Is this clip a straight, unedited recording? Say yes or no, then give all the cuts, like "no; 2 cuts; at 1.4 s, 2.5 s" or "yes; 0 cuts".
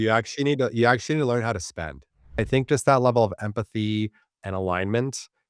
no; 1 cut; at 2.4 s